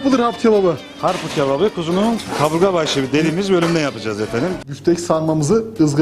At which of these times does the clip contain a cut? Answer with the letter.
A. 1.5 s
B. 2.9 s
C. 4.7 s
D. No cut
C